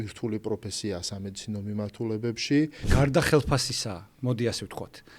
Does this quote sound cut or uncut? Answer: cut